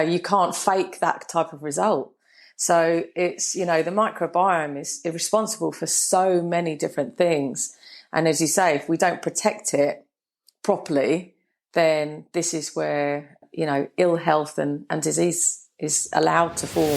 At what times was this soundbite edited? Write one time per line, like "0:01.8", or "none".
0:13.4

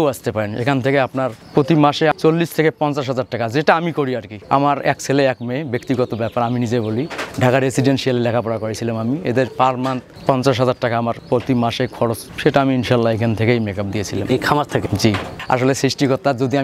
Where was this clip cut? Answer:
none

